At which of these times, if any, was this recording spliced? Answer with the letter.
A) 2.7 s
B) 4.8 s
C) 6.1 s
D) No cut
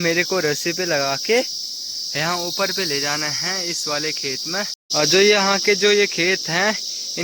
B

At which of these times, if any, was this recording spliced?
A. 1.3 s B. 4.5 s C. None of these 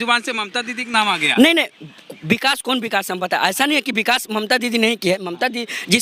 C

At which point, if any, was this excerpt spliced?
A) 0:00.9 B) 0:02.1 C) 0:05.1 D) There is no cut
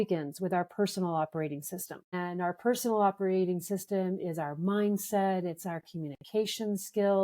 B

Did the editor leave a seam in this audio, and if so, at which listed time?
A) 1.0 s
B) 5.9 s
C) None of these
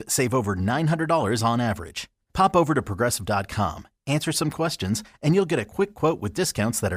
C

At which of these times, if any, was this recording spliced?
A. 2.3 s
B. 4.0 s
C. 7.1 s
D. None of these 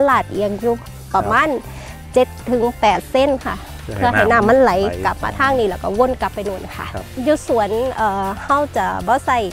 C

